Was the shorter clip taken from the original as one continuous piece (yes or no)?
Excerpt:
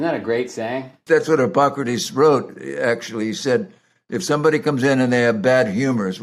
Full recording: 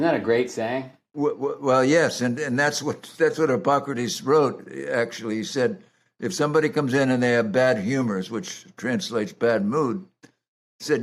no